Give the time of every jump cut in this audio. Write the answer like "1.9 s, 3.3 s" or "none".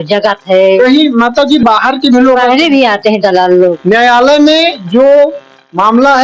3.7 s, 4.8 s